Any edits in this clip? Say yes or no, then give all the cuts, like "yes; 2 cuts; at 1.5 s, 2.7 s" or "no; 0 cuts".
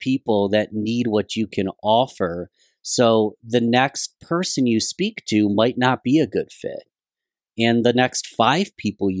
no; 0 cuts